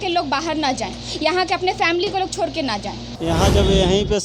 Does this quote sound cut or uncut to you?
cut